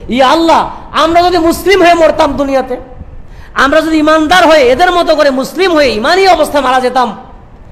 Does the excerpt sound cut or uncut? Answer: uncut